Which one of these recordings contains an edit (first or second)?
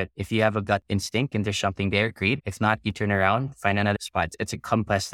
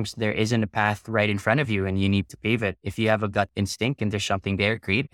first